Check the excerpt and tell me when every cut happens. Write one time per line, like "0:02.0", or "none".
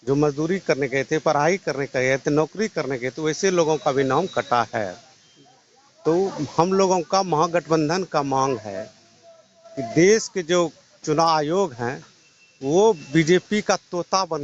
none